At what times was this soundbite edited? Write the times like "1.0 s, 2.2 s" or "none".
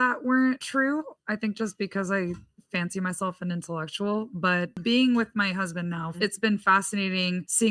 6.1 s

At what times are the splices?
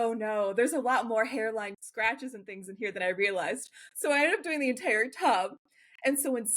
1.8 s

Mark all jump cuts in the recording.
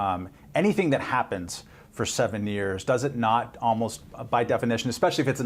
2.1 s

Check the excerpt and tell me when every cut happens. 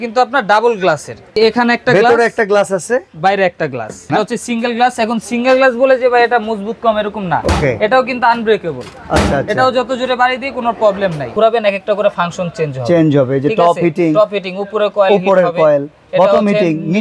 1.3 s, 4.1 s, 11.3 s

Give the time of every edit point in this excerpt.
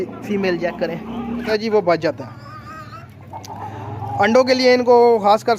1.5 s

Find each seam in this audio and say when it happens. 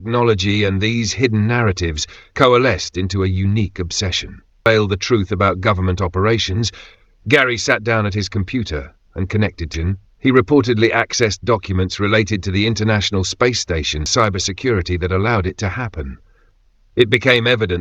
4.7 s, 9.8 s, 14.1 s

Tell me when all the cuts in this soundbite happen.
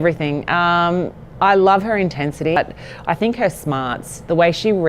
2.6 s

